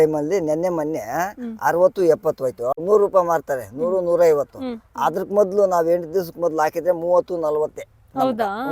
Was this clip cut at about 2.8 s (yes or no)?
yes